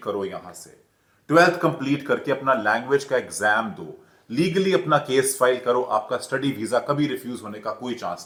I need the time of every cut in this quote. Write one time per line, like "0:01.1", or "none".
none